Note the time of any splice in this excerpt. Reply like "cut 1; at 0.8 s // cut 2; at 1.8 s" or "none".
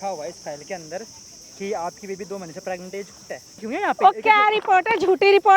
cut 1; at 3.6 s